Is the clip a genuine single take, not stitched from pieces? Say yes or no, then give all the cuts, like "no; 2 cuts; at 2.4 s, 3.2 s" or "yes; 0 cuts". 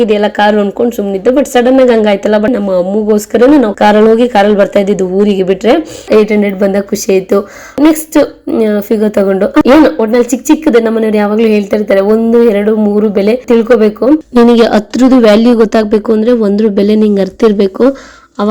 no; 5 cuts; at 2.5 s, 3.7 s, 6.0 s, 7.8 s, 9.6 s